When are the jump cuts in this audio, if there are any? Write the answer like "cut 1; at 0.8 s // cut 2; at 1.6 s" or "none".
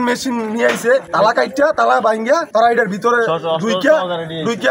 cut 1; at 1.1 s // cut 2; at 2.5 s